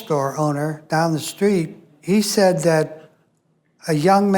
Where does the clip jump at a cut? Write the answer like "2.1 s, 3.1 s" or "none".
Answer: 1.9 s